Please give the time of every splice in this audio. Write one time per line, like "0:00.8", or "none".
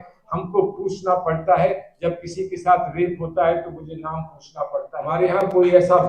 0:05.1